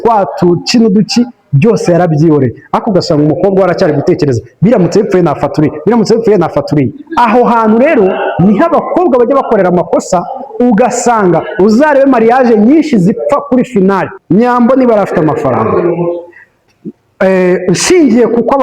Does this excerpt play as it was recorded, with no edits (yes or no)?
no